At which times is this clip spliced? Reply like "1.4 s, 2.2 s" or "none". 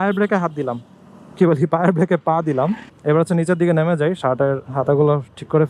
2.9 s